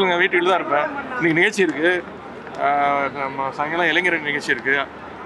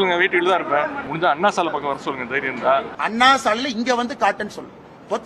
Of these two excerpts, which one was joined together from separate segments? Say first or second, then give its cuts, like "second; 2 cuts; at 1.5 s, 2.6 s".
second; 2 cuts; at 1.0 s, 2.9 s